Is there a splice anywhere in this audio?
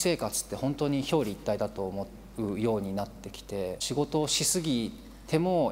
yes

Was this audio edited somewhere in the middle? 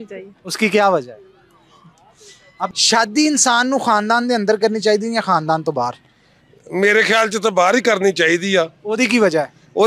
yes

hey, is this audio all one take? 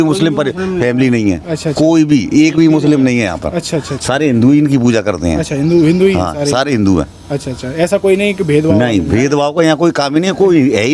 yes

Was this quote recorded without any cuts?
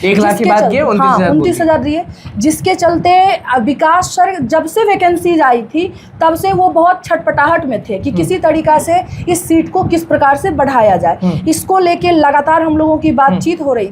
yes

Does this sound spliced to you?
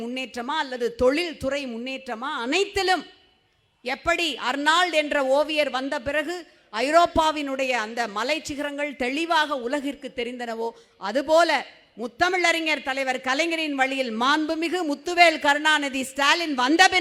no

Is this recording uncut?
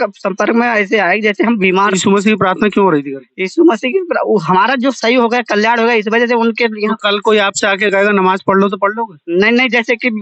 no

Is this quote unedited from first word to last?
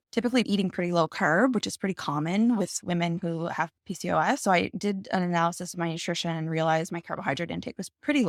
yes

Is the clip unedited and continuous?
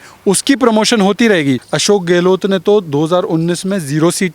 no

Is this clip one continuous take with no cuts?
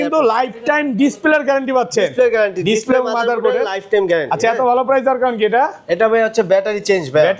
yes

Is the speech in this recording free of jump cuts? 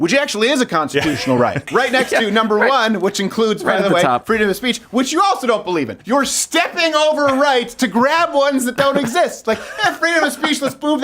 no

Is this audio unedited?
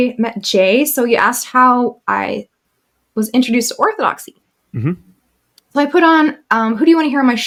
yes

